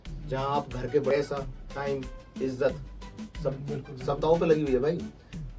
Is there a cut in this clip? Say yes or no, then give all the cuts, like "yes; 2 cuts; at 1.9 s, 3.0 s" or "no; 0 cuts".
yes; 1 cut; at 1.1 s